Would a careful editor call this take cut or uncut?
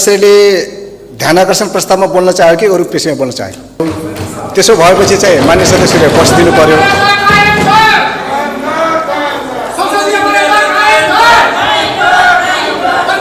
cut